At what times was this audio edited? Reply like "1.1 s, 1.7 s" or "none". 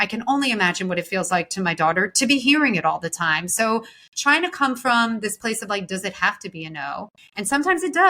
7.2 s